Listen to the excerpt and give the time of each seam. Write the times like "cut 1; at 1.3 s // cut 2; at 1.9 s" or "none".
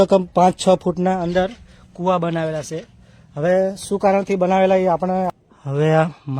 cut 1; at 5.4 s